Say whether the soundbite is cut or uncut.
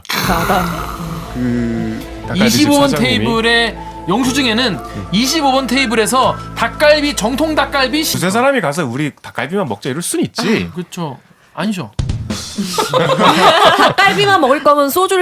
cut